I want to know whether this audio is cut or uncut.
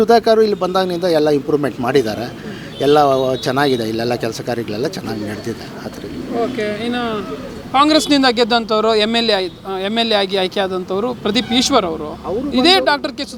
uncut